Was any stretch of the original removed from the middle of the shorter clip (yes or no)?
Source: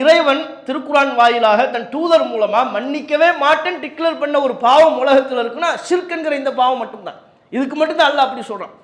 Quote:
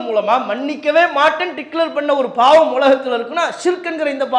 no